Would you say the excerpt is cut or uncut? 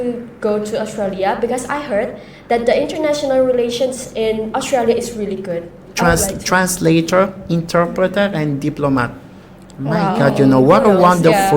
cut